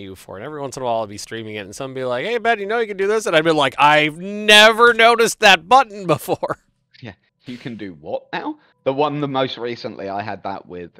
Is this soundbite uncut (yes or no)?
yes